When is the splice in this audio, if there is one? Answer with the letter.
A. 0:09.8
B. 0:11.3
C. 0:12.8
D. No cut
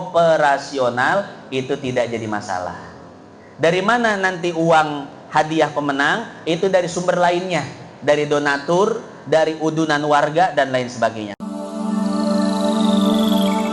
B